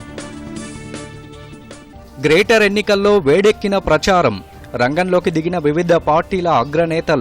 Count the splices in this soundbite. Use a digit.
1